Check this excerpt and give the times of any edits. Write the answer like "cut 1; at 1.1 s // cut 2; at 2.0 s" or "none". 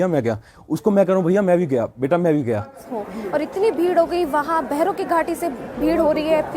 cut 1; at 2.8 s

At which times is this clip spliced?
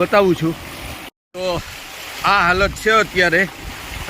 cut 1; at 1.1 s

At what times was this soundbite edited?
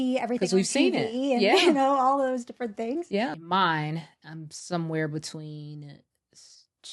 cut 1; at 3.4 s

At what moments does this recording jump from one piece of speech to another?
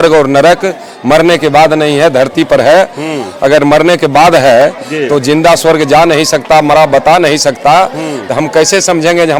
none

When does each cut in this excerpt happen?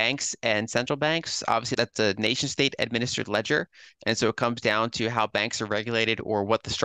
cut 1; at 1.7 s

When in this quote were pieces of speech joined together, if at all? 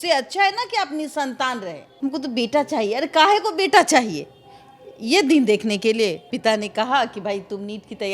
cut 1; at 1.8 s // cut 2; at 6.3 s

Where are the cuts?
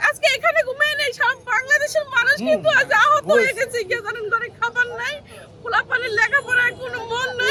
none

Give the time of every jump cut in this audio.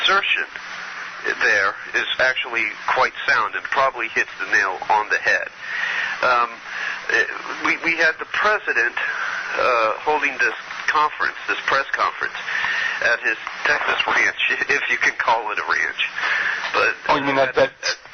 cut 1; at 9.4 s

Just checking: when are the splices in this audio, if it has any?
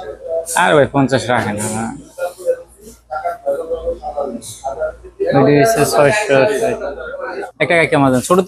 cut 1; at 7.4 s

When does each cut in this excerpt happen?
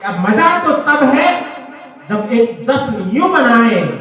none

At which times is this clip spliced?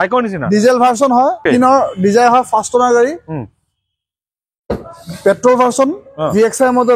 cut 1; at 1.4 s

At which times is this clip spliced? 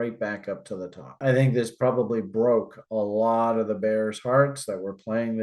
none

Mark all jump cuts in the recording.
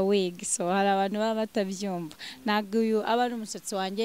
none

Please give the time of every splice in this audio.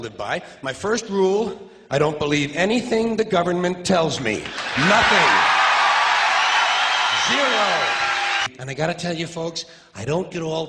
cut 1; at 8.5 s

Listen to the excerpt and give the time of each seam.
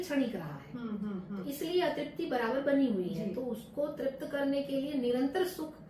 none

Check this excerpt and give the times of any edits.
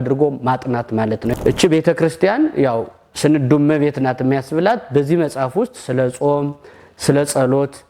cut 1; at 1.3 s

